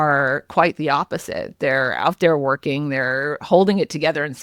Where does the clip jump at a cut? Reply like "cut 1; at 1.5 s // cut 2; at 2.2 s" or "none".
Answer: none

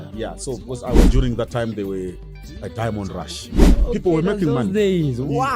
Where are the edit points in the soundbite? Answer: cut 1; at 1.1 s // cut 2; at 3.6 s

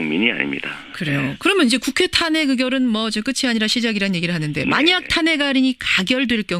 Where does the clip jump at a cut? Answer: cut 1; at 1.5 s

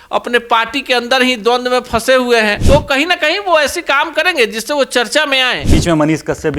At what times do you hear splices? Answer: cut 1; at 2.6 s // cut 2; at 5.6 s

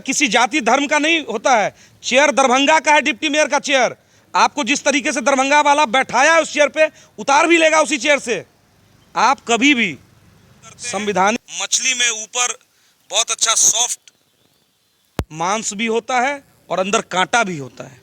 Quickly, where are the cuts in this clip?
cut 1; at 11.4 s

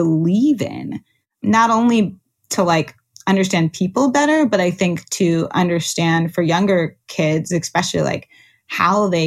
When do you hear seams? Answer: cut 1; at 1.4 s // cut 2; at 2.5 s

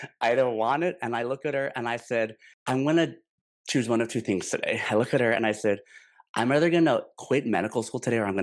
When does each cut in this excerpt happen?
cut 1; at 2.5 s

